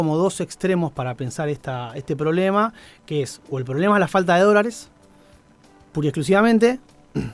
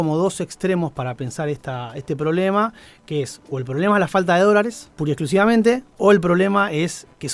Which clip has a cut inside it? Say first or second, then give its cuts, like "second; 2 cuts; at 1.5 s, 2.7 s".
second; 2 cuts; at 4.9 s, 5.9 s